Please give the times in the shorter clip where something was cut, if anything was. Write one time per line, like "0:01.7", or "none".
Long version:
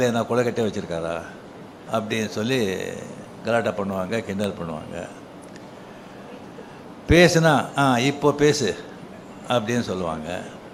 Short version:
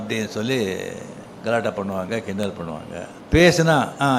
0:03.2